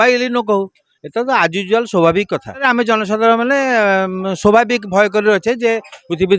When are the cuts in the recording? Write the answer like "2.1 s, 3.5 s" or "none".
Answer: 2.6 s